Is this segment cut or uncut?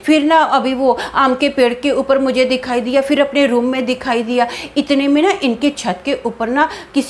uncut